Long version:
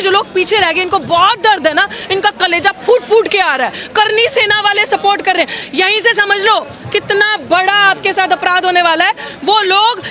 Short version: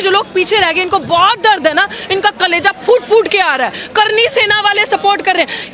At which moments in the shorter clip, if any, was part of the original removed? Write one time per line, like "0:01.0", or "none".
none